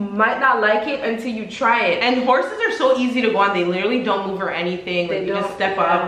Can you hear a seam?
no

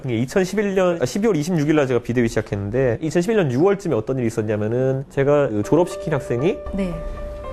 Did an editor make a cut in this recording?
no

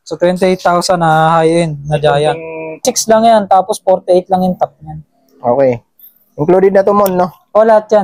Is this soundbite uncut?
no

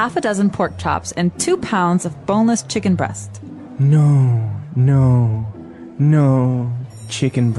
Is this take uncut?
yes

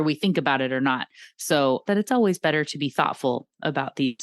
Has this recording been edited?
yes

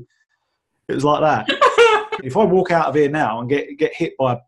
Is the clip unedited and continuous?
no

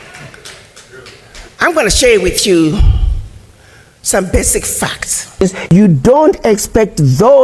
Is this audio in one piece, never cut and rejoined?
no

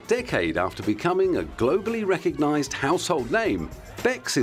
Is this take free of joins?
yes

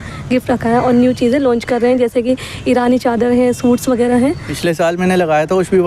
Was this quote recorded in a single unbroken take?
no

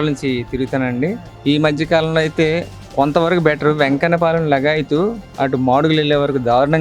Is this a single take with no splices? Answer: yes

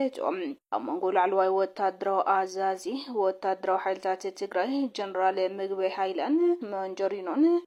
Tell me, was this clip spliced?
no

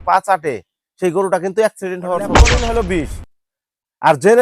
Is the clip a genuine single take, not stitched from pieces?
no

